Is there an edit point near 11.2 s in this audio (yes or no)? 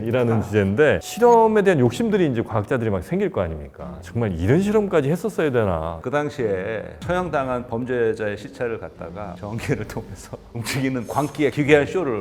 no